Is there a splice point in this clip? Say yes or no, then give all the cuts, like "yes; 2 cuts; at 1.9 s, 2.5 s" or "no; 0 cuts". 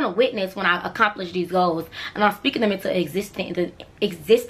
no; 0 cuts